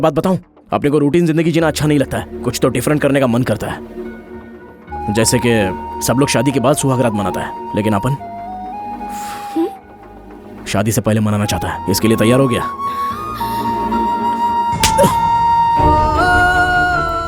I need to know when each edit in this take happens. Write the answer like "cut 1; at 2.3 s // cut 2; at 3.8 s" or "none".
none